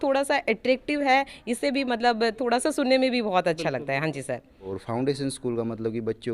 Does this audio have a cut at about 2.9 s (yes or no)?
no